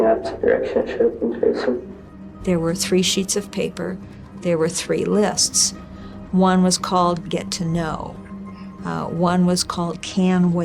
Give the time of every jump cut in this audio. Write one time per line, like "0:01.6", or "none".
0:02.4